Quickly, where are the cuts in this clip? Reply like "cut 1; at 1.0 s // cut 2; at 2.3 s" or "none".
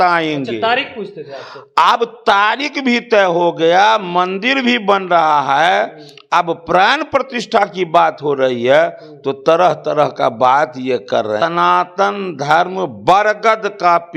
cut 1; at 11.4 s